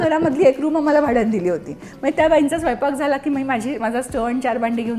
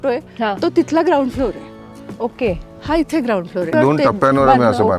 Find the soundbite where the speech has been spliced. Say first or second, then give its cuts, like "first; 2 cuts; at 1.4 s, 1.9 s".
second; 1 cut; at 3.7 s